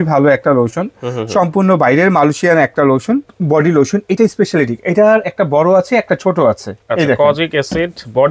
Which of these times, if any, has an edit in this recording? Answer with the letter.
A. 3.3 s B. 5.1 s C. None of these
A